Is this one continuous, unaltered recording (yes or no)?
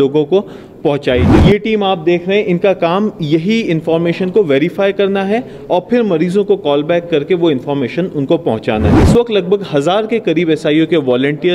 no